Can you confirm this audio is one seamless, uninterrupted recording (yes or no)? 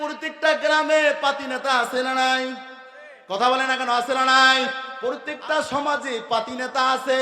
no